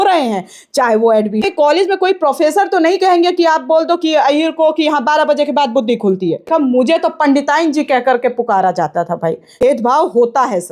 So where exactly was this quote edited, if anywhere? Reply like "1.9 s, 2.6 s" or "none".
1.4 s, 6.5 s, 9.6 s

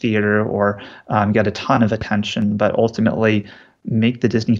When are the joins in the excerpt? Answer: none

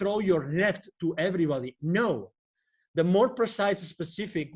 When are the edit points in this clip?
none

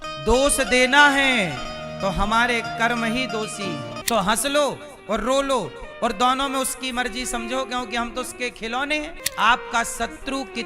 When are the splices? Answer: 3.9 s, 9.2 s

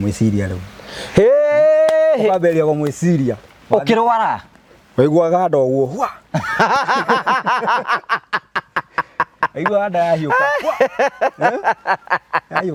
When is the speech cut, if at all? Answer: none

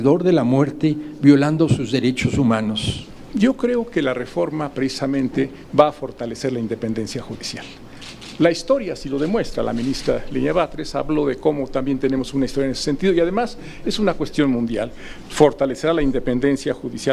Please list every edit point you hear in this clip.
2.9 s

